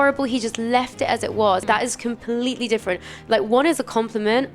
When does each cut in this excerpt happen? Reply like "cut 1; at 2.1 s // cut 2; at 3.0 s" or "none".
cut 1; at 1.6 s